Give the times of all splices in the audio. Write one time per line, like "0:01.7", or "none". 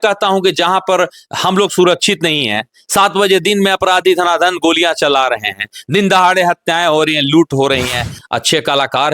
0:08.2